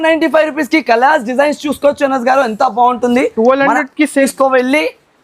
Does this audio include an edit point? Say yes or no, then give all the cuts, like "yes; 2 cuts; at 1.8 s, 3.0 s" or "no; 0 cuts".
yes; 1 cut; at 4.3 s